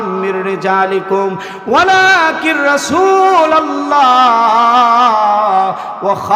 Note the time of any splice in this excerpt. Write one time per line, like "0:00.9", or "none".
none